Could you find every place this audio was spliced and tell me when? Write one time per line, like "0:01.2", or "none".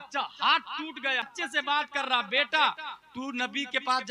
0:01.3